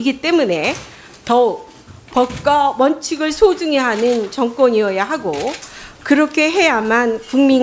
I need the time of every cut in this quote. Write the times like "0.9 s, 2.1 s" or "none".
6.5 s